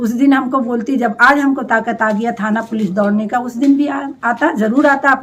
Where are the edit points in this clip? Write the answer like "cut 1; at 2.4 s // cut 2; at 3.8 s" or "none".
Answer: none